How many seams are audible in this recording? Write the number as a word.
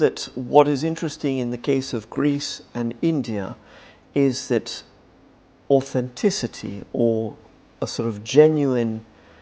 zero